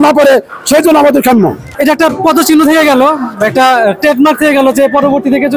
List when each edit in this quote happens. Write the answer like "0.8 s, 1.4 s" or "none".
1.7 s